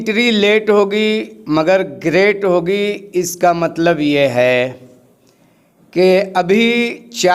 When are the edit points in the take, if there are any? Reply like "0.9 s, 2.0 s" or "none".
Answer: none

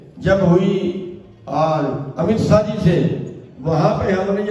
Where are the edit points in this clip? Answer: none

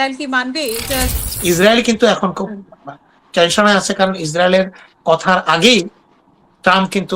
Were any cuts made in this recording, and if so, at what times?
1.1 s

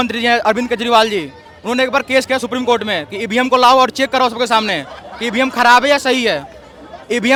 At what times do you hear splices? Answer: none

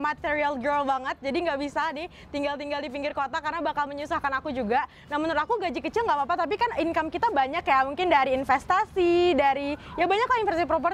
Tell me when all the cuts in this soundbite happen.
none

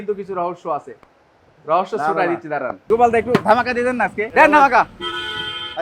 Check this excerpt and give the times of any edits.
2.9 s, 4.2 s

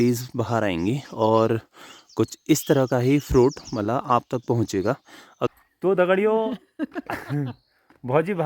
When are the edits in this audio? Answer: 5.5 s

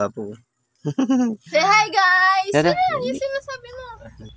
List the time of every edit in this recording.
none

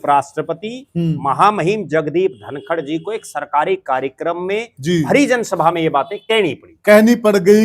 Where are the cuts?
none

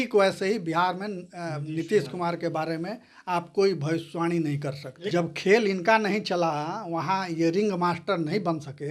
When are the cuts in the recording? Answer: 4.9 s

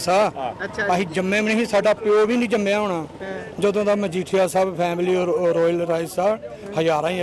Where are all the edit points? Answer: none

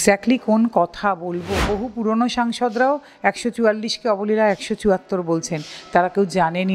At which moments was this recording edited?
1.7 s

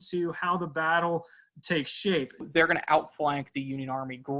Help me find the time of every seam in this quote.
2.5 s

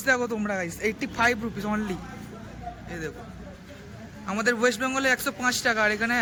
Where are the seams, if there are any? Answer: none

